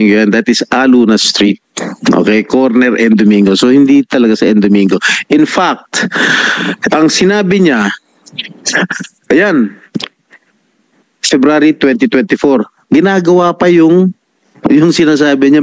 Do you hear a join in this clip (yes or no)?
no